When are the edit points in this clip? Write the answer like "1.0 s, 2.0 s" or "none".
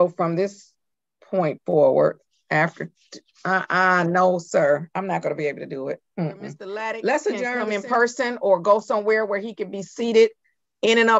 7.6 s